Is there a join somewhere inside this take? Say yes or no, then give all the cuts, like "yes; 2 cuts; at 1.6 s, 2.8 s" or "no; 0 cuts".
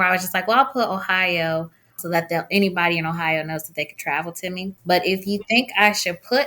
yes; 2 cuts; at 2.0 s, 4.8 s